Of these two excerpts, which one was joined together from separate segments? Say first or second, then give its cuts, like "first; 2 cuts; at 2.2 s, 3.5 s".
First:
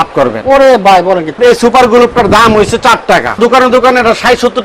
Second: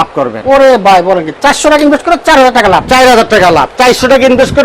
first; 2 cuts; at 1.4 s, 3.4 s